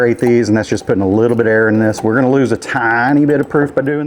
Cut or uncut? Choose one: uncut